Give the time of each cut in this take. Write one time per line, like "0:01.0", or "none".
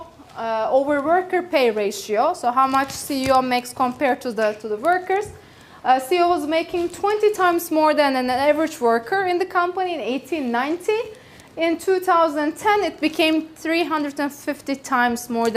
none